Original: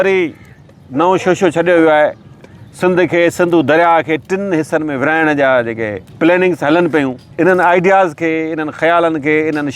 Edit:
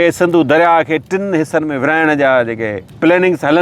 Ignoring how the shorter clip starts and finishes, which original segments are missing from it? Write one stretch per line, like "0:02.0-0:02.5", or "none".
none